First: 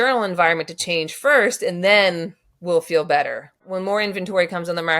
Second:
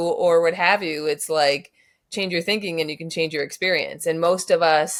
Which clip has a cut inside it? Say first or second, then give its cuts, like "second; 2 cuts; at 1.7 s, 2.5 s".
first; 1 cut; at 3.6 s